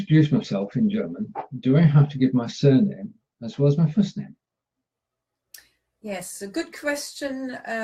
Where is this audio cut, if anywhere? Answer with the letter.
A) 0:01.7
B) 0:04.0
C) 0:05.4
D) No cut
A